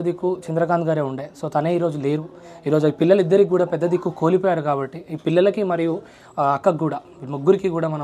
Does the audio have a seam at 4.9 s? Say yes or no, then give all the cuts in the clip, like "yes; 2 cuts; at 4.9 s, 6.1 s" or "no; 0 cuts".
no; 0 cuts